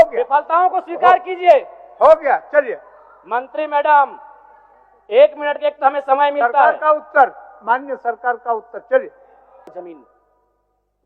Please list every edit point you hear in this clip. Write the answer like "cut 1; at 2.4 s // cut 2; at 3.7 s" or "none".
cut 1; at 9.7 s